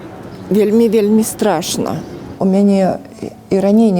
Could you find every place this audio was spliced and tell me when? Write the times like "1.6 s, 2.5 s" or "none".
2.2 s